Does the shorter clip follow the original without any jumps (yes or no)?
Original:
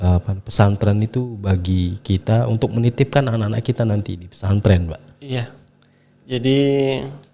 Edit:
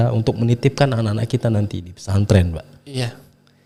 yes